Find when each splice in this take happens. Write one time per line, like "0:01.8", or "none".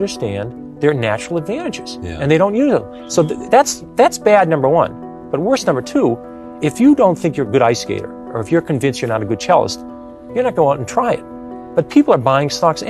none